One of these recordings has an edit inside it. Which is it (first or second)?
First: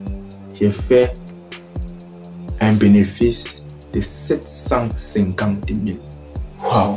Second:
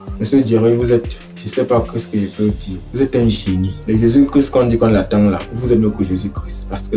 second